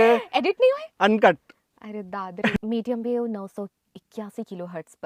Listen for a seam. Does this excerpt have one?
yes; 1 cut; at 2.6 s

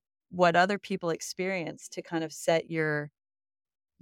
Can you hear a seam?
no; 0 cuts

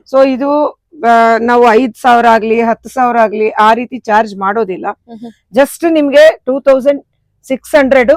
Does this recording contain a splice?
no; 0 cuts

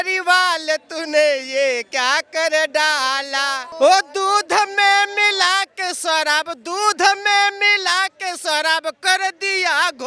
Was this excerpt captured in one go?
no; 1 cut; at 3.6 s

